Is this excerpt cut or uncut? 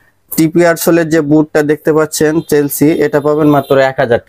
uncut